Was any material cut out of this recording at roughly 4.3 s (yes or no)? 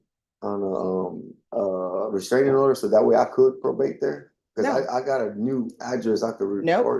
no